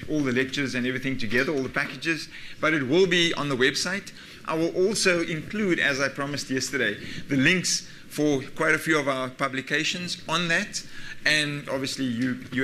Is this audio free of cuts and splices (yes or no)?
yes